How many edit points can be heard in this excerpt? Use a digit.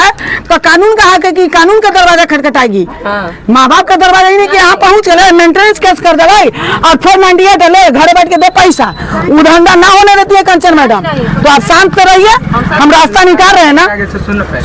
0